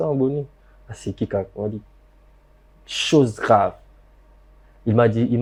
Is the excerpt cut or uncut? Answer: uncut